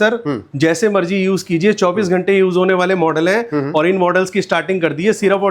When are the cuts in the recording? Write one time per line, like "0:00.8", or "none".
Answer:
none

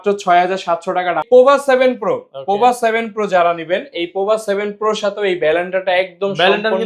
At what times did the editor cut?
0:01.2

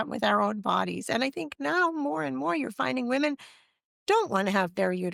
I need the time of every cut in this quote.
none

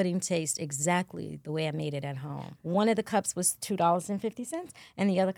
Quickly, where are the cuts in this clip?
0:02.5

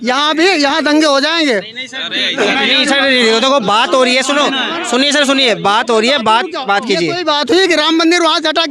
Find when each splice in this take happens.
none

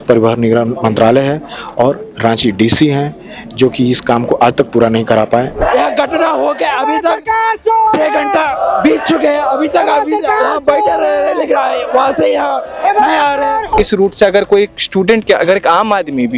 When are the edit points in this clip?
0:05.6
0:13.8

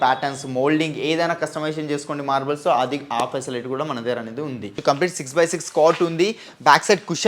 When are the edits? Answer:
0:04.8

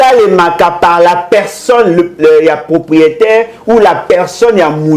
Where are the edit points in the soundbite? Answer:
none

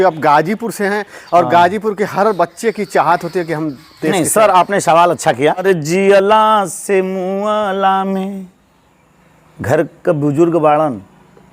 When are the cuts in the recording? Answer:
0:05.6

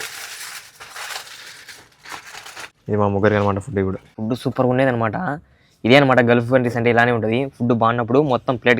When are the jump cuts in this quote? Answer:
0:02.8
0:04.1

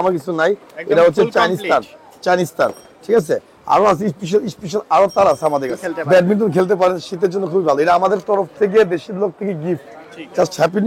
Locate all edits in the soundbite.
0:05.9

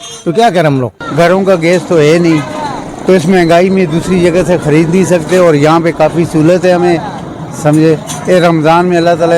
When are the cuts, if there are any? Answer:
0:01.0

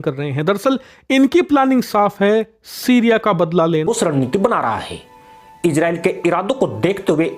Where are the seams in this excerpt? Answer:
0:03.8

